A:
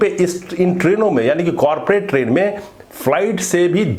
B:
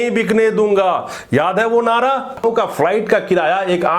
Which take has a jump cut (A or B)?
B